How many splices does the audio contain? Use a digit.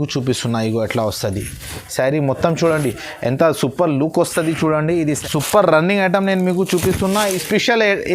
1